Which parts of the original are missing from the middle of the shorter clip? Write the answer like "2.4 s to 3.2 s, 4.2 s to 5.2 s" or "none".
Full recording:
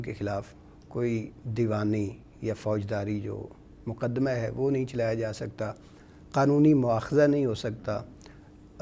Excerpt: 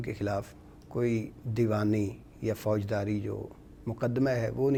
none